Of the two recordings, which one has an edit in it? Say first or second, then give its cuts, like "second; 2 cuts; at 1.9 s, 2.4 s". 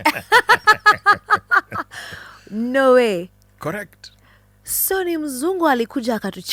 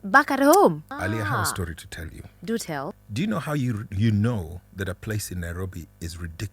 second; 2 cuts; at 0.9 s, 2.9 s